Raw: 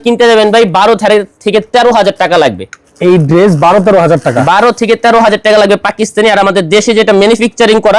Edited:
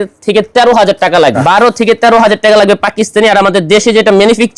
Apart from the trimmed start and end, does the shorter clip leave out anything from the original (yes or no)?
yes